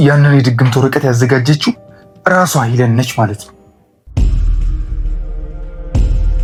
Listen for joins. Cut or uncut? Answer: uncut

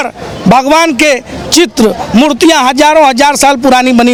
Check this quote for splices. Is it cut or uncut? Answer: uncut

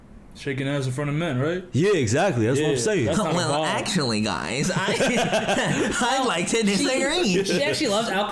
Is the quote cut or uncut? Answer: uncut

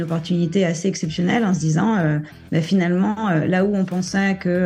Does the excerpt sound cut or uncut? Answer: uncut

